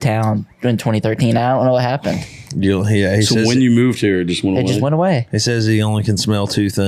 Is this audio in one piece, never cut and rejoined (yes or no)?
yes